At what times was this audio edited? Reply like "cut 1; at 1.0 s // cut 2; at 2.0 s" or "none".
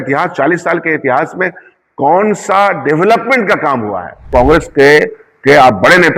cut 1; at 4.3 s